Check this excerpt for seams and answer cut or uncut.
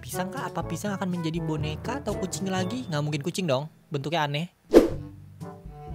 uncut